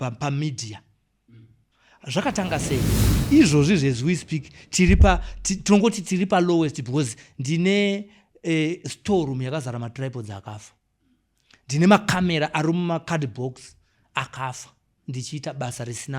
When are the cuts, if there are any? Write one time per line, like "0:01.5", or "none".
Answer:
0:03.0